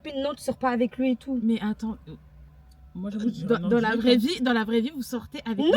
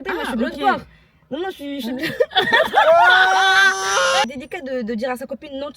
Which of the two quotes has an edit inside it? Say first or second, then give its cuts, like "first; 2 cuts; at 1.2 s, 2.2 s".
second; 1 cut; at 4.3 s